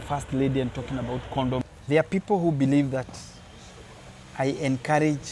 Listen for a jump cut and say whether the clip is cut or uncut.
cut